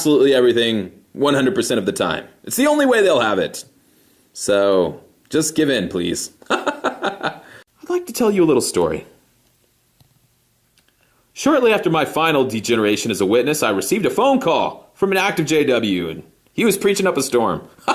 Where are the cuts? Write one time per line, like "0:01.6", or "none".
0:16.4